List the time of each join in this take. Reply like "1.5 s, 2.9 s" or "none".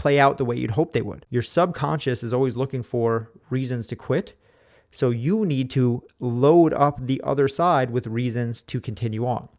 1.2 s